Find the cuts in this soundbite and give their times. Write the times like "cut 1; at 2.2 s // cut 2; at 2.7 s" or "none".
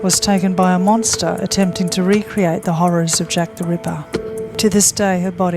cut 1; at 1.4 s // cut 2; at 4.5 s